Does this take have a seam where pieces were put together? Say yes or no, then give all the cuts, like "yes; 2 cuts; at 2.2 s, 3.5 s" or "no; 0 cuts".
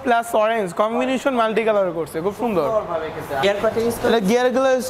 yes; 1 cut; at 3.4 s